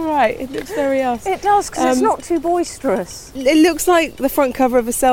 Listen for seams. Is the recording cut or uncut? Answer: cut